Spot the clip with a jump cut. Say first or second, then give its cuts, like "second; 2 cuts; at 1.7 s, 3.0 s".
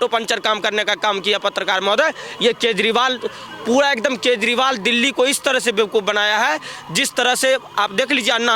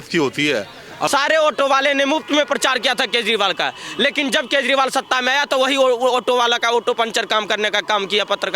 second; 1 cut; at 1.1 s